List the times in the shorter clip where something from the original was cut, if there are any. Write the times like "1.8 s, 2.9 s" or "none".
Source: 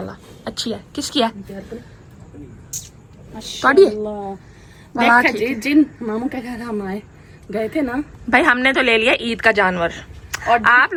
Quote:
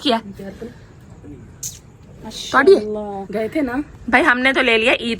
3.2 s